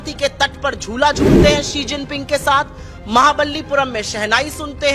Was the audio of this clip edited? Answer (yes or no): no